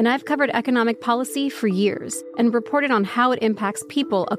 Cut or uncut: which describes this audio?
cut